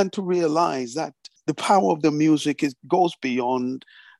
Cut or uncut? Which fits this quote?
cut